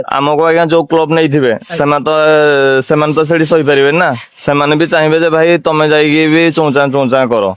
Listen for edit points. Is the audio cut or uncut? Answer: uncut